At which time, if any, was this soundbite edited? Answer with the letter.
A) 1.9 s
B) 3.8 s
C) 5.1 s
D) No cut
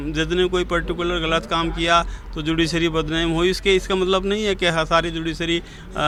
D